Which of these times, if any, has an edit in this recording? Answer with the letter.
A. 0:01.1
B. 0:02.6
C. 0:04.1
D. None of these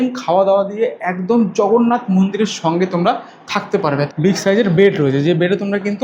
C